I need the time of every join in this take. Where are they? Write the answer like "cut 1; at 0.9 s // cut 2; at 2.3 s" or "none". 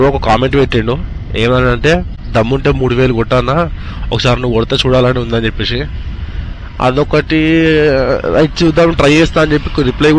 none